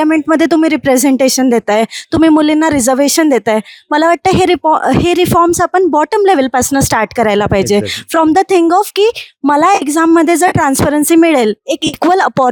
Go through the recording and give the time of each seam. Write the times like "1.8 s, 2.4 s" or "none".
none